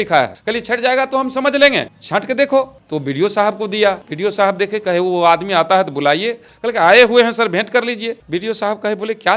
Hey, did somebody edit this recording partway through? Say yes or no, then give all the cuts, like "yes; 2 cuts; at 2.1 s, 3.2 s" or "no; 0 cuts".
yes; 2 cuts; at 4.1 s, 8.2 s